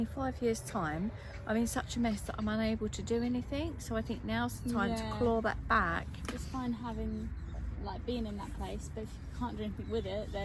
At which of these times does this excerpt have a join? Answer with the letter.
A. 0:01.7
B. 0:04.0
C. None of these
C